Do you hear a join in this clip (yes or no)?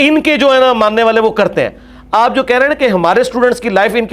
no